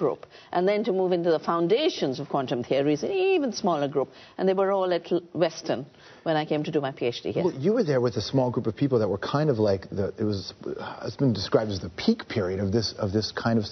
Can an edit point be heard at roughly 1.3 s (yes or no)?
yes